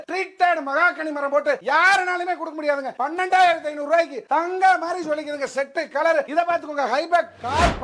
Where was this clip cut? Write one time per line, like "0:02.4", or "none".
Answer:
0:03.0
0:06.3